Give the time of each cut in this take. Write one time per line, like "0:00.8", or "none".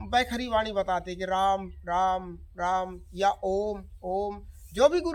none